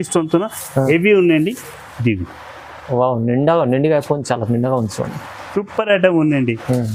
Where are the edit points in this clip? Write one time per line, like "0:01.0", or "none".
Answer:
none